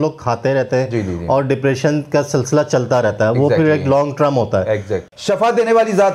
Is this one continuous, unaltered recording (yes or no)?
no